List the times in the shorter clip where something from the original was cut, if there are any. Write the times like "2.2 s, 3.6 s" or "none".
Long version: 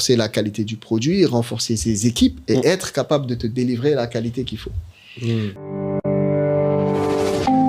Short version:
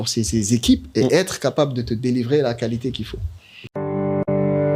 3.7 s